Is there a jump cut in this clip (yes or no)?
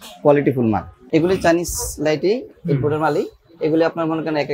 yes